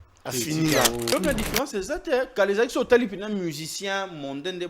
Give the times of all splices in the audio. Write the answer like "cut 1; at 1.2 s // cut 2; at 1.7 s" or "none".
cut 1; at 1.1 s